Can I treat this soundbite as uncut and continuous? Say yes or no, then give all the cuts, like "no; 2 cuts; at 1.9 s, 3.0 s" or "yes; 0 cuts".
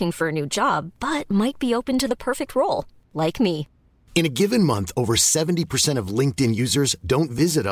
yes; 0 cuts